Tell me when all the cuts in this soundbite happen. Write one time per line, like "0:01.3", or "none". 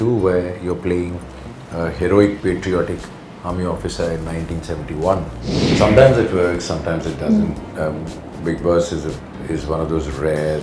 0:05.6